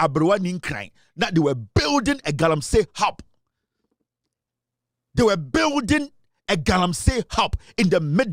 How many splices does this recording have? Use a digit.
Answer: 0